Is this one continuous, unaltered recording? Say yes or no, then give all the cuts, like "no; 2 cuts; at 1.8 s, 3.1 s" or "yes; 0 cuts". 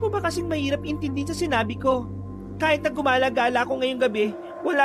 yes; 0 cuts